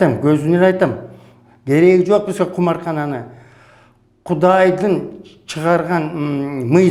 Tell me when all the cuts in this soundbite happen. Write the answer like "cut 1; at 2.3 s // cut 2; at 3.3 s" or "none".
none